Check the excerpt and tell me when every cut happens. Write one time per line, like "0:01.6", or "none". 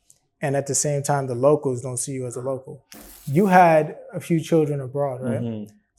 0:03.0